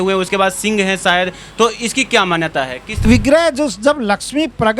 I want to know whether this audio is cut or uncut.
cut